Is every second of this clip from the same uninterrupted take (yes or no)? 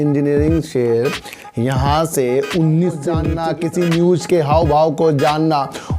no